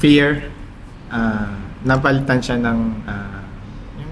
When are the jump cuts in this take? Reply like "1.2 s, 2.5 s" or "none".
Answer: none